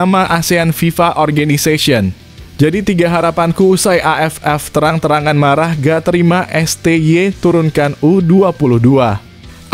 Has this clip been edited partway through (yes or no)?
no